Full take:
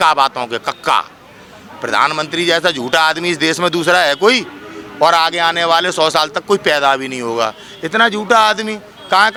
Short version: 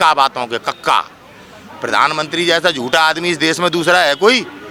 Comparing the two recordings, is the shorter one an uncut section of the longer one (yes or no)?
yes